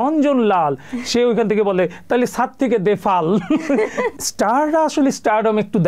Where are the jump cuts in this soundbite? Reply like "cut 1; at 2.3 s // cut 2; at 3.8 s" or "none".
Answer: cut 1; at 4.1 s